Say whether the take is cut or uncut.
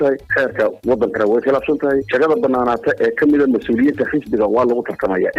uncut